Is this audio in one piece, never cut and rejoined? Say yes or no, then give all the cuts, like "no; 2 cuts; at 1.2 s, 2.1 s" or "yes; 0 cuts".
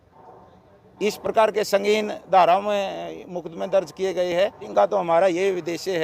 no; 1 cut; at 4.6 s